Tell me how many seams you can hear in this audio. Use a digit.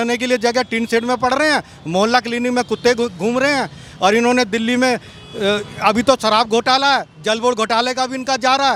0